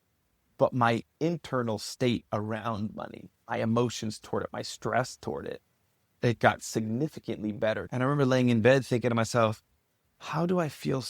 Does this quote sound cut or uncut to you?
cut